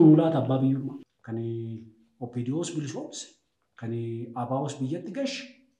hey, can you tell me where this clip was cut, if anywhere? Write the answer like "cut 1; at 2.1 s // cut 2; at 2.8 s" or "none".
cut 1; at 1.1 s